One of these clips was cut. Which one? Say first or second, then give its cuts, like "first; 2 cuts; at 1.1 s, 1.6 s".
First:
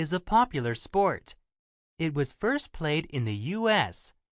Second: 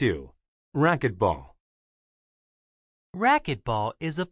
first; 1 cut; at 2.7 s